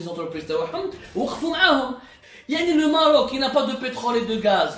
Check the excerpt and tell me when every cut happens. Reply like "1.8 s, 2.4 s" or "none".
2.1 s